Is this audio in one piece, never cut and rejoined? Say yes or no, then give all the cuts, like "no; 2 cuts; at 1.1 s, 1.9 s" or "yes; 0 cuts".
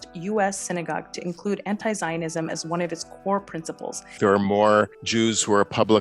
no; 2 cuts; at 4.2 s, 5.0 s